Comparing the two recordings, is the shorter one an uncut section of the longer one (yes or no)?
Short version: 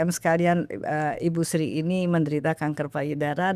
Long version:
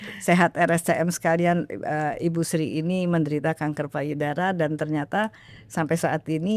yes